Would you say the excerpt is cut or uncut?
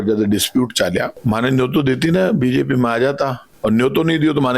cut